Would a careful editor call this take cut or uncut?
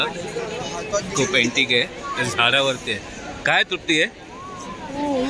uncut